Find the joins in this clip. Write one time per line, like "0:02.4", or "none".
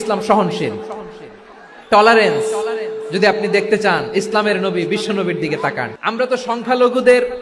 0:05.9